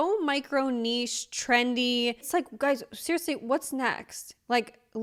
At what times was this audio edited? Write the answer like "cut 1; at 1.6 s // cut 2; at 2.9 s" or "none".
none